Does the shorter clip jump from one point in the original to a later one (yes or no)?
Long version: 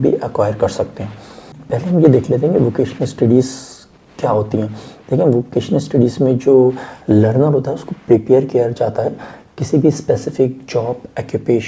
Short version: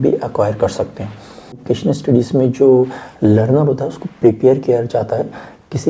yes